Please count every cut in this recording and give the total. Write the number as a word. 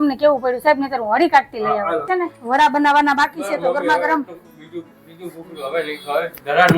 one